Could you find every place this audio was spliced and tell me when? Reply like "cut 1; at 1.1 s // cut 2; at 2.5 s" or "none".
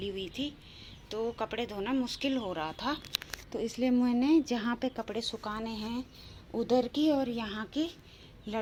none